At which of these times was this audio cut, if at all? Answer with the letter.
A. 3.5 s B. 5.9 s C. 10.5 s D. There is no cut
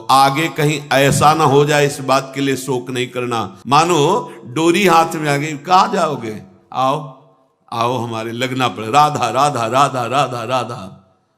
A